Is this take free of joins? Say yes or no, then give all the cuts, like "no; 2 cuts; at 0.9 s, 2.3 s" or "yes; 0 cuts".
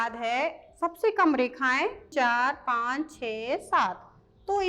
no; 1 cut; at 2.1 s